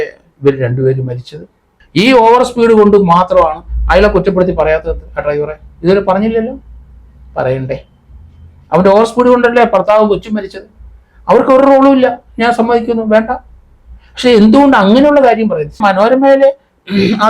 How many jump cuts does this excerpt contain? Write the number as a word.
two